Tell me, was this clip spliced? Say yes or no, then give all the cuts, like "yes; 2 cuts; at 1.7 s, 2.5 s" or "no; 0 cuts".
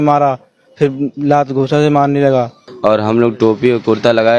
yes; 1 cut; at 2.6 s